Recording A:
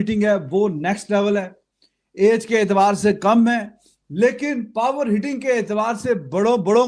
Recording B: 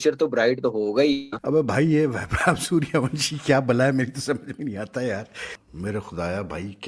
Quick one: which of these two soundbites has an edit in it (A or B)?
B